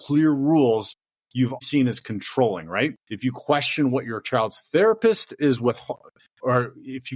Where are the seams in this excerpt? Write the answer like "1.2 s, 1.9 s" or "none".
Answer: 1.6 s, 3.1 s